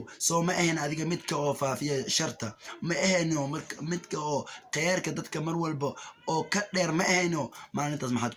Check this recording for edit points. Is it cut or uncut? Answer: uncut